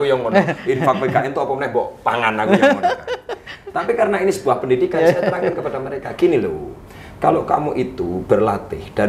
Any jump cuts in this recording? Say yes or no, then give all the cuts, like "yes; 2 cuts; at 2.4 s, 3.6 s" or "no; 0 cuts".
no; 0 cuts